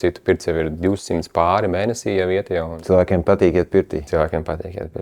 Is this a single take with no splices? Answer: no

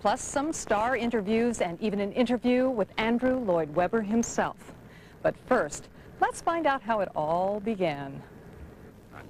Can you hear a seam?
no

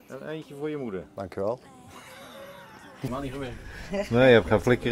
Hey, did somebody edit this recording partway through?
yes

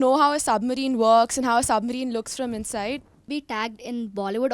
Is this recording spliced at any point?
yes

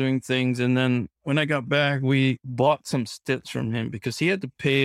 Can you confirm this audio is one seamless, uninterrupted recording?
no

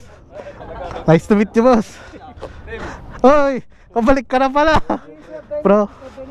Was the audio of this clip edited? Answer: no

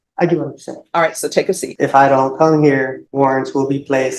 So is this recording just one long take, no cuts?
no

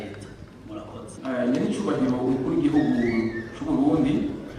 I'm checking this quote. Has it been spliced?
yes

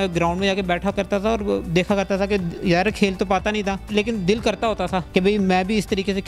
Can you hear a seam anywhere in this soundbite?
yes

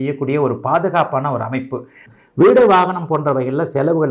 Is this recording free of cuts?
no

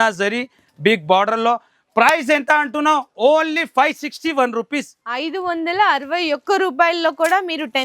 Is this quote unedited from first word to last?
yes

